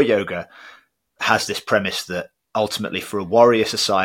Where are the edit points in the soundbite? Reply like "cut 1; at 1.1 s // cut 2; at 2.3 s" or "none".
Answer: none